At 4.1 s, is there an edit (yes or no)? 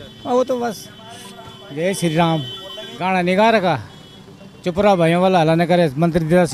no